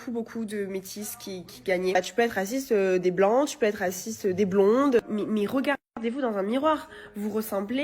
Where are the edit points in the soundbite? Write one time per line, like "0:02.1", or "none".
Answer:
0:02.0
0:05.0